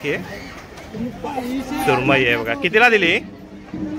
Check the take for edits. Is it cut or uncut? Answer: uncut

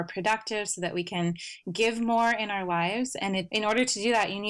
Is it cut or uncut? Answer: uncut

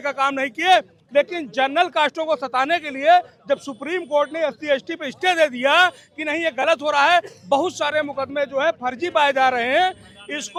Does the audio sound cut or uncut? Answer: uncut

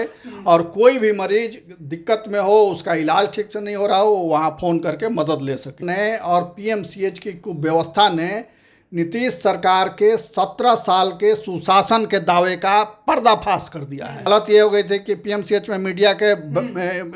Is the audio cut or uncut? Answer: cut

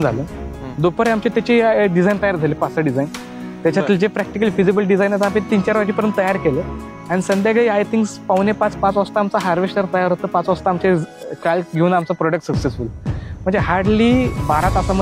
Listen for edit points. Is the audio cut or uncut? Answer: uncut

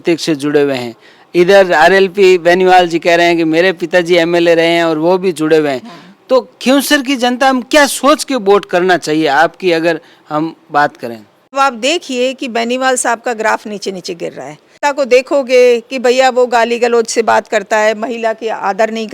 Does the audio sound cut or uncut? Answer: cut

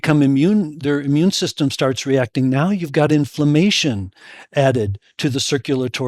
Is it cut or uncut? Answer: uncut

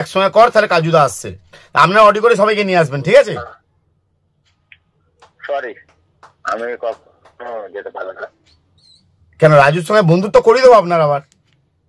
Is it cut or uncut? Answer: uncut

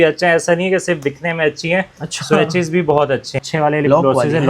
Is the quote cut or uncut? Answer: cut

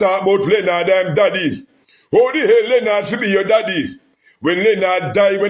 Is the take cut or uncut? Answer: uncut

